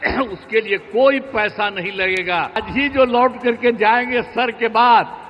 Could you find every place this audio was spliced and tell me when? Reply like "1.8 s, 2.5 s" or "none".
2.7 s